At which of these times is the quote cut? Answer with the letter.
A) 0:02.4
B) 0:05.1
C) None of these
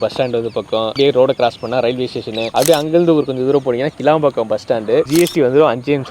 B